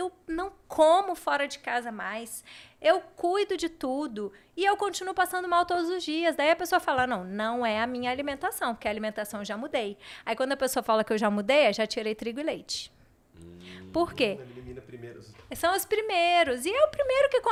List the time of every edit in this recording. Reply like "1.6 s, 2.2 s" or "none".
none